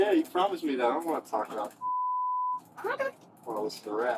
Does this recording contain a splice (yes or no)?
no